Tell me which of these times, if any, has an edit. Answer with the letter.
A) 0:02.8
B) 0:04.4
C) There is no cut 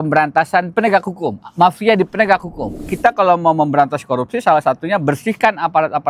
A